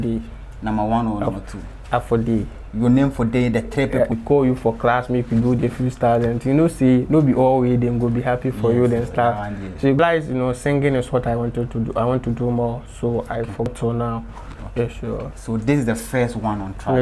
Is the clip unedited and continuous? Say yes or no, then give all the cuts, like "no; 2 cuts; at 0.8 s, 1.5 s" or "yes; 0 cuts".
no; 3 cuts; at 4.1 s, 10.0 s, 13.7 s